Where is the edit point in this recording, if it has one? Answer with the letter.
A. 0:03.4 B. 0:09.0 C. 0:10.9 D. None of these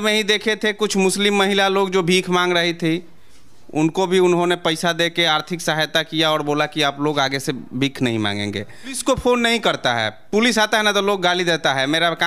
B